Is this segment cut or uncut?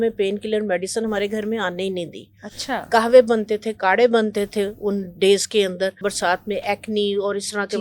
cut